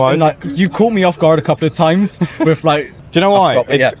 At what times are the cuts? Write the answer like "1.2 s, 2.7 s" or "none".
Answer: 3.0 s